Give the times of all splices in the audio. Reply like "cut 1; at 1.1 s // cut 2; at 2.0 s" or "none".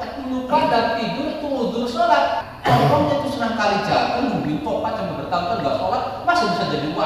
cut 1; at 2.5 s